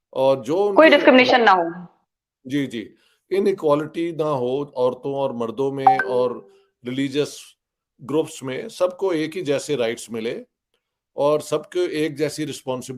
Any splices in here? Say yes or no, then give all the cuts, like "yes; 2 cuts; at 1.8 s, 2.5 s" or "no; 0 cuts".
no; 0 cuts